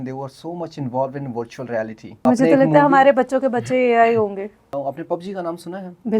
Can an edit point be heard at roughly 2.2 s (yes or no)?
yes